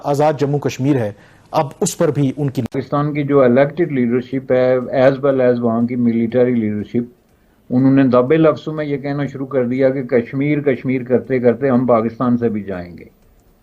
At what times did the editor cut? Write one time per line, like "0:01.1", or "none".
0:02.7